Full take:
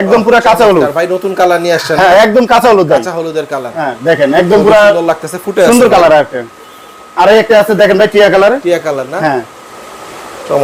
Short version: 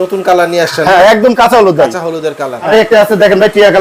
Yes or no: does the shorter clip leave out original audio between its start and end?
yes